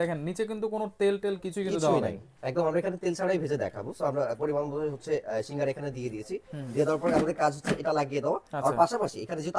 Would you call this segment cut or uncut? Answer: uncut